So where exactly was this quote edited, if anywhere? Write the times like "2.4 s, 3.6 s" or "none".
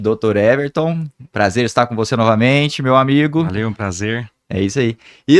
none

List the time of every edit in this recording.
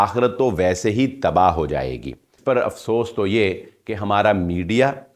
2.3 s

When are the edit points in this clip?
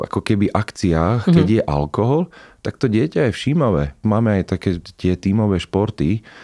3.9 s

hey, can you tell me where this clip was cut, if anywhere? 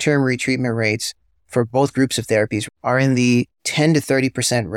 none

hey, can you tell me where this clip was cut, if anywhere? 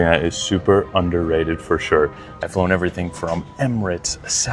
2.3 s

